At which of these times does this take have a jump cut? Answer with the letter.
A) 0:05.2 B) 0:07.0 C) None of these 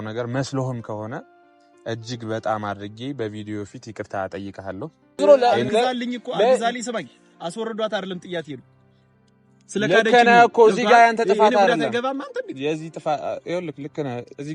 A